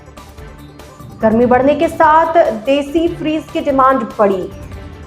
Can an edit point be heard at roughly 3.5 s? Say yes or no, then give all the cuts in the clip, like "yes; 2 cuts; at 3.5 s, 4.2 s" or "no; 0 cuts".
no; 1 cut; at 1.0 s